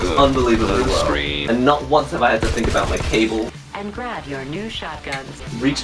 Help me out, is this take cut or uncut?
cut